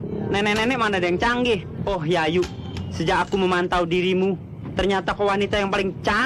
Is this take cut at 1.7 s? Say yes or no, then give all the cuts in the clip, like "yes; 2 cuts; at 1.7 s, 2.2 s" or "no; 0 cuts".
yes; 1 cut; at 1.7 s